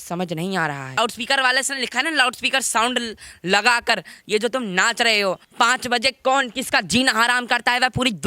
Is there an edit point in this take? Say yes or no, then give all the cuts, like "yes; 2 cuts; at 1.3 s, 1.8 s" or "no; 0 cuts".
yes; 2 cuts; at 1.0 s, 5.5 s